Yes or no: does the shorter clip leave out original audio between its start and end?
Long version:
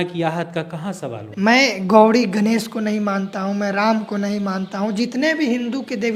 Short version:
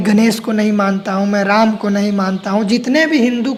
no